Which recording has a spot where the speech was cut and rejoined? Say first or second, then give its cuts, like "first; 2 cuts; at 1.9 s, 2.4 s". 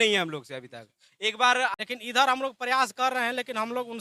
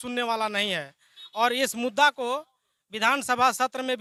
first; 1 cut; at 1.7 s